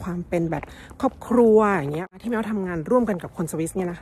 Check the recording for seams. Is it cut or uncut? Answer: cut